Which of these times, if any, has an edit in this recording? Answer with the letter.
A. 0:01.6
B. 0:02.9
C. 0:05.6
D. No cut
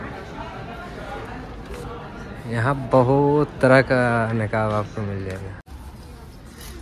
C